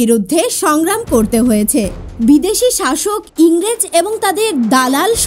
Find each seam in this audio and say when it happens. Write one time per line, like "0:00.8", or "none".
none